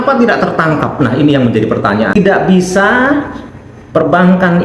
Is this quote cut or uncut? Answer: cut